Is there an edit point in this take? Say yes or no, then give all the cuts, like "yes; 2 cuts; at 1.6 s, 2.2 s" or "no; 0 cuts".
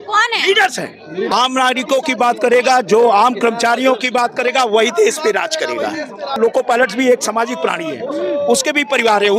yes; 2 cuts; at 1.3 s, 6.4 s